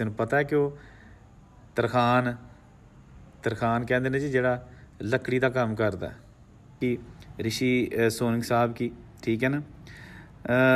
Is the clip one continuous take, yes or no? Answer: no